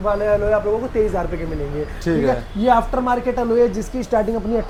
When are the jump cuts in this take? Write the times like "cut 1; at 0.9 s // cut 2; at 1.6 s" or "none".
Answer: none